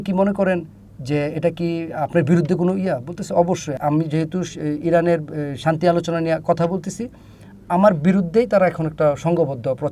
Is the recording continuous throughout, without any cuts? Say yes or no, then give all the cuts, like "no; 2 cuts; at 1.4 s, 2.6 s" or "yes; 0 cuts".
no; 1 cut; at 3.8 s